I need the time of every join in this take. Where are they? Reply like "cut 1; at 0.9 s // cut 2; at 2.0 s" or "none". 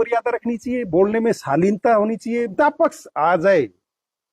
cut 1; at 2.5 s